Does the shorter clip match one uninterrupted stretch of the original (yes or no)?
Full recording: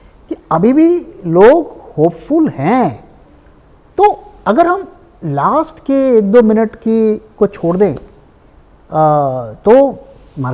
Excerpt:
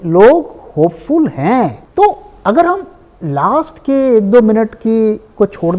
no